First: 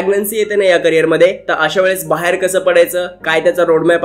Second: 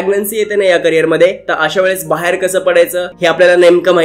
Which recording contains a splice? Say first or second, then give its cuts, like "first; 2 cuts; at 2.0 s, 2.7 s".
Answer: second; 1 cut; at 3.1 s